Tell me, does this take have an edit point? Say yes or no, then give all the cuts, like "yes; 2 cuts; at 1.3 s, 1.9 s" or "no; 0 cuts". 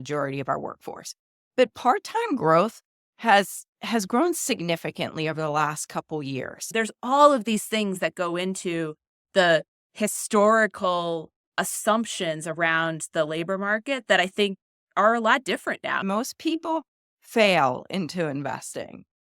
yes; 2 cuts; at 6.7 s, 16.0 s